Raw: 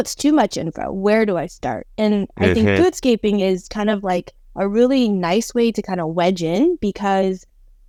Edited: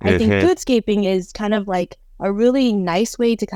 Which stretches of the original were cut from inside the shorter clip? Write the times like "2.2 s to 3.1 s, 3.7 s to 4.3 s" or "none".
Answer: none